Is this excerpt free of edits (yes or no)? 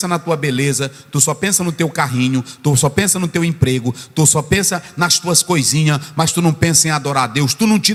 yes